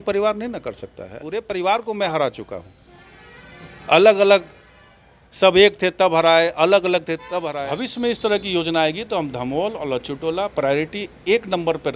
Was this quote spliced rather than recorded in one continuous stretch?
yes; 2 cuts; at 1.5 s, 7.5 s

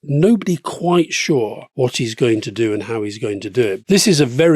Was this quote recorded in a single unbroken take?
no; 1 cut; at 1.6 s

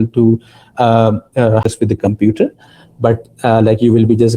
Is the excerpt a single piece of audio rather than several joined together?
no; 1 cut; at 1.7 s

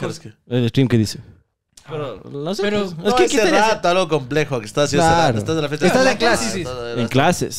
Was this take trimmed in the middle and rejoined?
no; 0 cuts

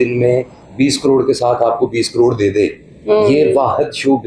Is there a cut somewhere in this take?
no; 0 cuts

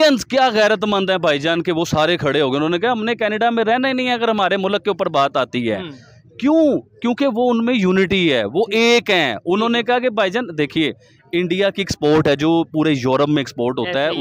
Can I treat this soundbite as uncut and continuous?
yes; 0 cuts

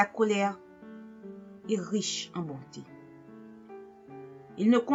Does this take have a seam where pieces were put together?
no; 0 cuts

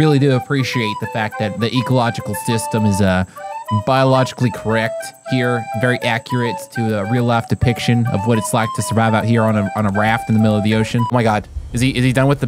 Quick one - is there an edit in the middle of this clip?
yes; 1 cut; at 11.1 s

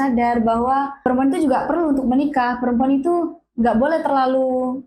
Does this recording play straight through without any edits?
no; 1 cut; at 1.0 s

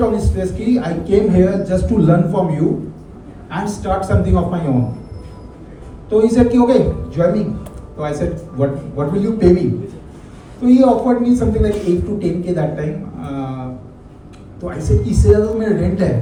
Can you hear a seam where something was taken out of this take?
no; 0 cuts

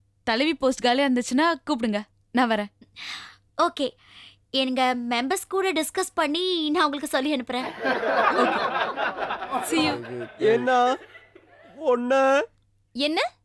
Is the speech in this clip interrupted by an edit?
yes; 1 cut; at 9.9 s

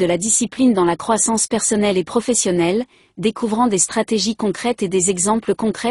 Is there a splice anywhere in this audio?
no; 0 cuts

